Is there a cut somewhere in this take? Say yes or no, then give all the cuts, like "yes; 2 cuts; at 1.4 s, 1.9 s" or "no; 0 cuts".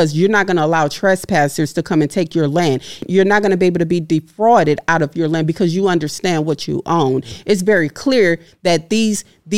yes; 2 cuts; at 3.0 s, 7.4 s